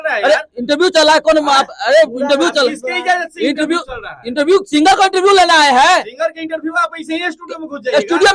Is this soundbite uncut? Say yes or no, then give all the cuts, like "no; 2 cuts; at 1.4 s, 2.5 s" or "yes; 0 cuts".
yes; 0 cuts